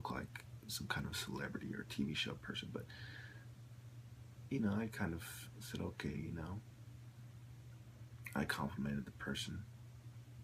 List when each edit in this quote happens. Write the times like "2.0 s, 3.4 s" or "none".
7.9 s

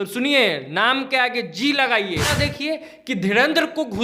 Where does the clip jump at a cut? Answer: 2.3 s

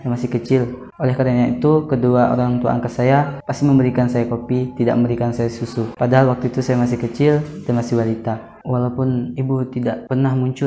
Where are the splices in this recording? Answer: 8.6 s

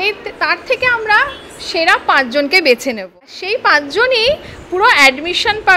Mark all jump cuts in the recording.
3.1 s

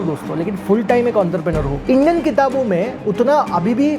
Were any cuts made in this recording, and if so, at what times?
1.7 s

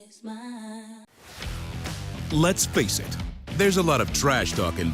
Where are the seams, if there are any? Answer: 1.0 s

